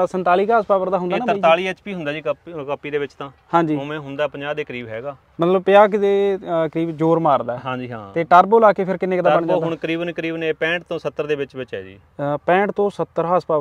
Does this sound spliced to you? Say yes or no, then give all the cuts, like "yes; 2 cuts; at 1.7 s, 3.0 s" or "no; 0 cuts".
no; 0 cuts